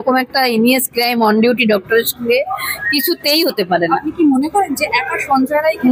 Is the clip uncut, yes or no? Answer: yes